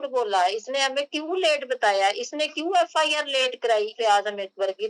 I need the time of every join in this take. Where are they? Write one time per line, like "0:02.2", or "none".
0:04.0